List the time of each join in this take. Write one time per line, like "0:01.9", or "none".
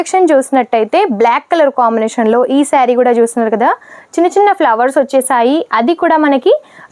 none